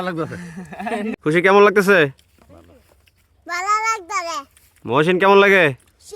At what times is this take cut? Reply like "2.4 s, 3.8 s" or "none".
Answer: 1.2 s